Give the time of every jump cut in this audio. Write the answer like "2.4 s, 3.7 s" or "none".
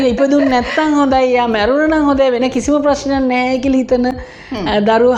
none